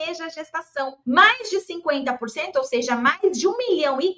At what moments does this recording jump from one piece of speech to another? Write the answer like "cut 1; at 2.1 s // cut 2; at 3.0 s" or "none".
cut 1; at 1.0 s

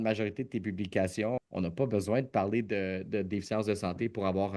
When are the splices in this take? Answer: cut 1; at 1.4 s

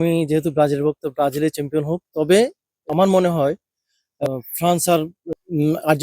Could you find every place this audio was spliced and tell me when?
cut 1; at 2.8 s // cut 2; at 4.1 s // cut 3; at 5.2 s

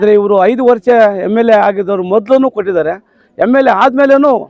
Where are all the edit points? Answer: none

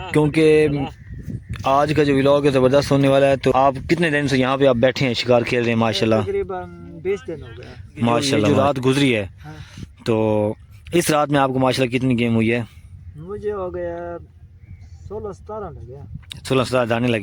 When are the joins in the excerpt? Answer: cut 1; at 3.5 s // cut 2; at 8.5 s

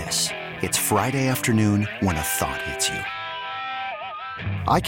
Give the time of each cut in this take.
none

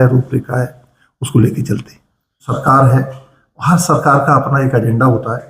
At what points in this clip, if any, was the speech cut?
cut 1; at 2.5 s

